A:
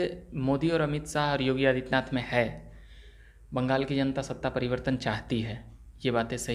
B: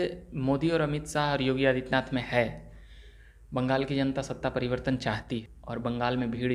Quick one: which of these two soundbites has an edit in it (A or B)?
B